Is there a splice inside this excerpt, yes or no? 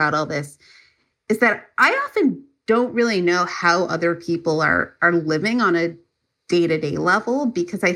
no